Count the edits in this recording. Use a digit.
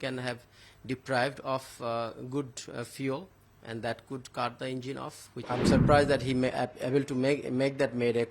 1